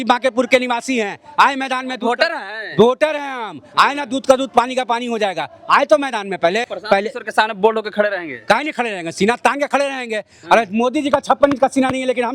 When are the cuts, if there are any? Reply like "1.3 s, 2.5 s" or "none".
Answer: 6.7 s